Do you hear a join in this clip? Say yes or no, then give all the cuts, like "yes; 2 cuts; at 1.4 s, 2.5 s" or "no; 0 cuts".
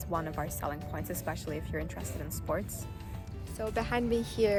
no; 0 cuts